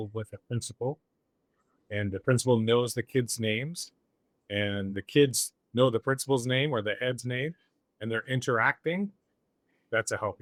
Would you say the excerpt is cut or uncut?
uncut